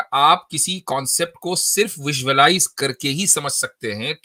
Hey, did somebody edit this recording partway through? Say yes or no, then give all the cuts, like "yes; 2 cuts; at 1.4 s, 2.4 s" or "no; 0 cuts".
no; 0 cuts